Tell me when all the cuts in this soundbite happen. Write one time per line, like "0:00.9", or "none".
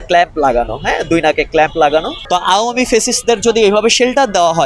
0:02.2